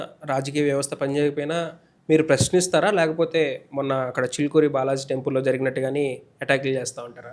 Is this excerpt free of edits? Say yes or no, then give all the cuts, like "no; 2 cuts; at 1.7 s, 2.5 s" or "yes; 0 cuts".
yes; 0 cuts